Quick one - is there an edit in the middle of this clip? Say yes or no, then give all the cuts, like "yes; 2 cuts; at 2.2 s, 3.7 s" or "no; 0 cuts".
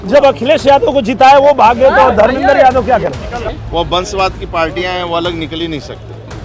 yes; 1 cut; at 3.5 s